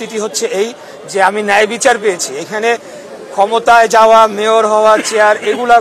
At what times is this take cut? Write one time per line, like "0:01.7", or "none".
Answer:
none